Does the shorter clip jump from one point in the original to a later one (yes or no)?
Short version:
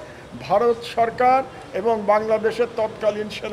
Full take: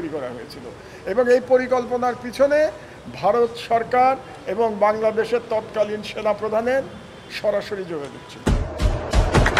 no